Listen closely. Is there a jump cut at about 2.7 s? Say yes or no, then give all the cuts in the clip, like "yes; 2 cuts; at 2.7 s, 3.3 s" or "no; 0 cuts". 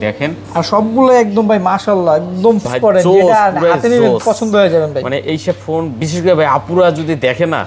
yes; 1 cut; at 2.7 s